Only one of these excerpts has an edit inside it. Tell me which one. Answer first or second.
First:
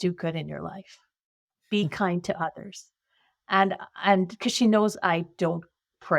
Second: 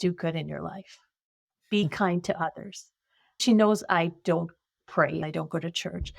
second